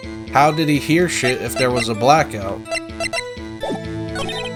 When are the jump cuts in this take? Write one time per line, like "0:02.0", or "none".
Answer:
none